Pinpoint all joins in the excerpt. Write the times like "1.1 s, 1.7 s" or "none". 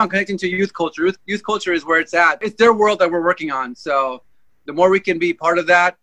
2.4 s